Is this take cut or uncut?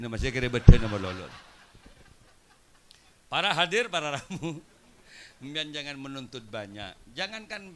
uncut